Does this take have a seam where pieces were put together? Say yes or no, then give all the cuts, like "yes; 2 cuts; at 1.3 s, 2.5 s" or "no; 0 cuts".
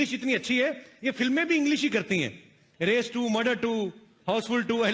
no; 0 cuts